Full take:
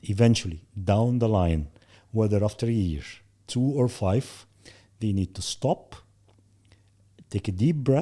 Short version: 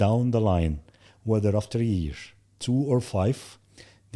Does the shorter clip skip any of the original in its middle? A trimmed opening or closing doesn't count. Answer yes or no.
no